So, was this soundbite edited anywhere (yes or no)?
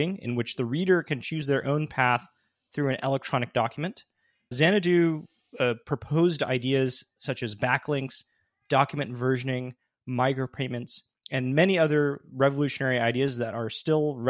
yes